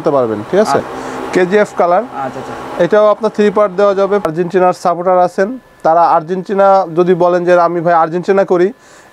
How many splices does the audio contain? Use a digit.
2